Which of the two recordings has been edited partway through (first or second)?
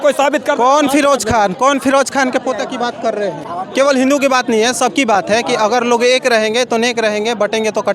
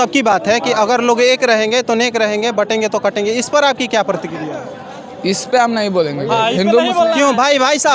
first